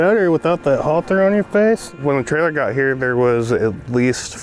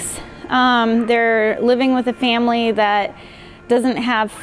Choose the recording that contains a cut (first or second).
first